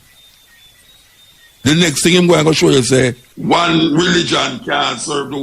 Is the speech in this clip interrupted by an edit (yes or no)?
yes